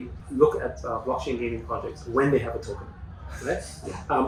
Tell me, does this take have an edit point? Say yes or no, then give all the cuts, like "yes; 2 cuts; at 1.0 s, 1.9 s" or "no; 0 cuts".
no; 0 cuts